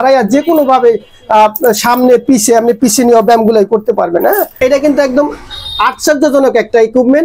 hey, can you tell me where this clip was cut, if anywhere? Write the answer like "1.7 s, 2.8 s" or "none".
4.5 s